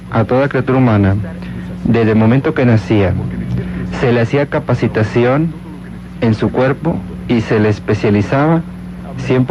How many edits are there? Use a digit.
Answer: 0